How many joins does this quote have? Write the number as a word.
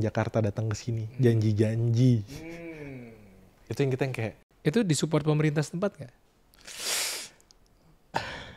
one